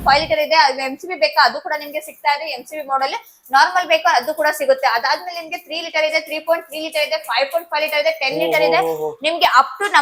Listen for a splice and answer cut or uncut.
uncut